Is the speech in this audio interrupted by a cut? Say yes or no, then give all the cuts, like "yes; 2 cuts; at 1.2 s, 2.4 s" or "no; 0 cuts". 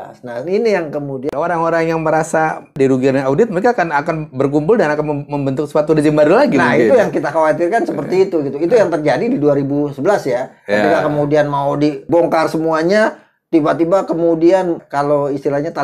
yes; 4 cuts; at 1.3 s, 2.7 s, 12.0 s, 14.8 s